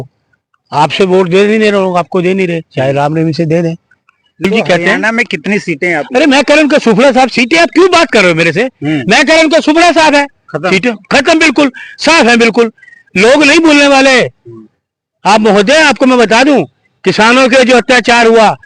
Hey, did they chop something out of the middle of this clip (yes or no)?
yes